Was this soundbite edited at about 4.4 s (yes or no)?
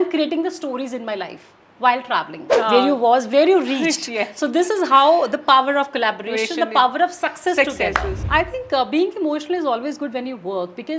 no